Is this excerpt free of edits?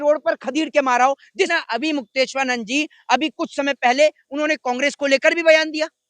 no; 1 cut; at 1.5 s

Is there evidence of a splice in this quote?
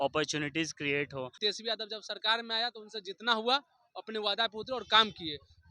yes; 1 cut; at 1.4 s

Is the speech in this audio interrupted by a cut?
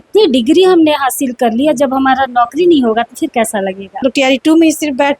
yes; 1 cut; at 4.0 s

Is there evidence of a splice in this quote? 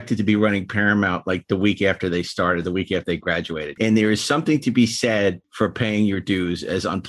yes; 2 cuts; at 3.8 s, 5.5 s

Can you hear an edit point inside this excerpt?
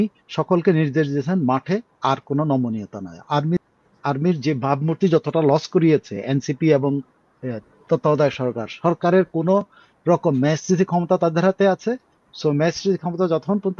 yes; 1 cut; at 3.6 s

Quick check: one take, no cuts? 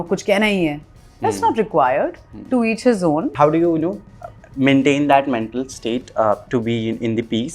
no; 1 cut; at 3.3 s

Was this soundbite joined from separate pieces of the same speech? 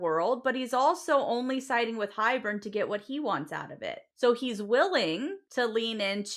yes; 2 cuts; at 4.0 s, 5.4 s

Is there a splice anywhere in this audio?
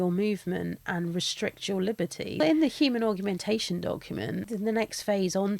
yes; 2 cuts; at 2.4 s, 4.5 s

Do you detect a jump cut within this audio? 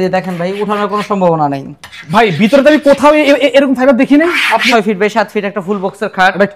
yes; 1 cut; at 4.7 s

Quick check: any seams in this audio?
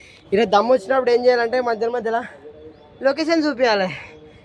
no; 0 cuts

